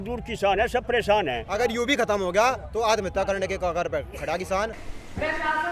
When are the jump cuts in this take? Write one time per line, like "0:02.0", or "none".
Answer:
0:01.2
0:04.7

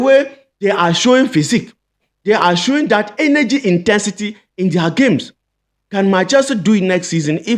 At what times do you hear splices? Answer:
none

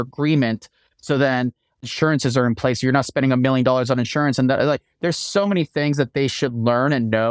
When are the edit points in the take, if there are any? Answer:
none

